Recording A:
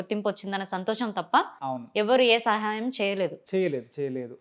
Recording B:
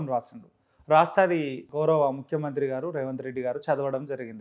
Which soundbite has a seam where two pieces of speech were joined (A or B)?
B